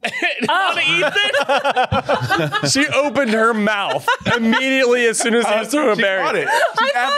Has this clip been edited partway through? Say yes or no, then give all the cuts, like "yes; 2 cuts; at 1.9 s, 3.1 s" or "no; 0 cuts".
no; 0 cuts